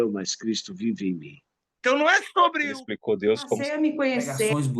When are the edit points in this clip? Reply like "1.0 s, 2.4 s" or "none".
1.6 s